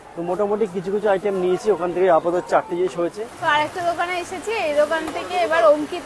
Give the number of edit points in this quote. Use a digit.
1